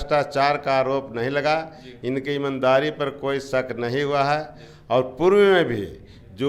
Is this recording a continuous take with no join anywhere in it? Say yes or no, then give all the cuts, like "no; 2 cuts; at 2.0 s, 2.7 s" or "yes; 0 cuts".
yes; 0 cuts